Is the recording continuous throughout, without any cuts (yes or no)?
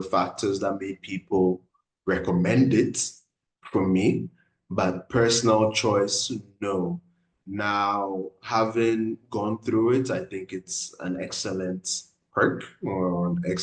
yes